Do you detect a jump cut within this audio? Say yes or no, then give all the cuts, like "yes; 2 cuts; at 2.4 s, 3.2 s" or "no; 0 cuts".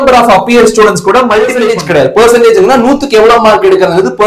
yes; 1 cut; at 1.7 s